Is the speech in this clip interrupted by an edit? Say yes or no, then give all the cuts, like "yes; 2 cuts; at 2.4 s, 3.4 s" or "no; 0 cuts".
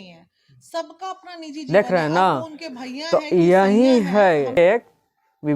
yes; 2 cuts; at 1.7 s, 4.6 s